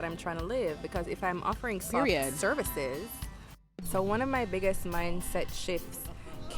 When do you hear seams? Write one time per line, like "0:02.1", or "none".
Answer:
0:03.7